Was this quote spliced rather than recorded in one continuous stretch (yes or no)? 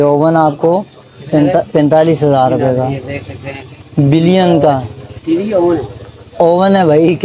no